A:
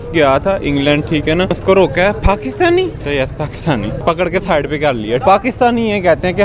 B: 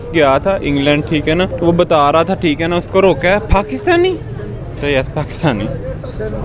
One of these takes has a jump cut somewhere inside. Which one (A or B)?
A